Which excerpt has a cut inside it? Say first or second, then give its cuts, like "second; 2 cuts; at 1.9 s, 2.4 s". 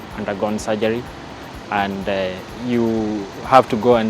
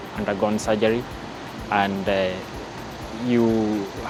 first; 1 cut; at 2.5 s